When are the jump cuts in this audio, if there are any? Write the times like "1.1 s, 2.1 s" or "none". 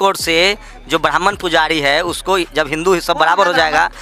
none